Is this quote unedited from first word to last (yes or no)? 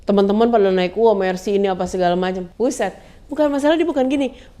no